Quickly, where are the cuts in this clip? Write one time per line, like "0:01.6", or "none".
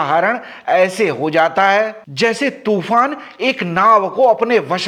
none